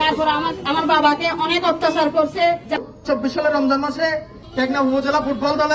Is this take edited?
yes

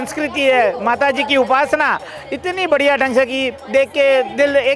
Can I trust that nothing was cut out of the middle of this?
yes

